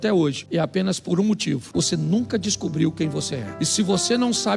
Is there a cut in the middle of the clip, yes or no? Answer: no